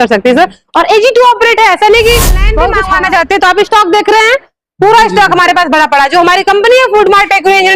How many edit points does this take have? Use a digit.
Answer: 1